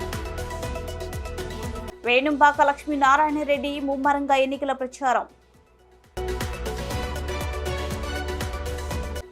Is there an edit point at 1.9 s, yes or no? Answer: yes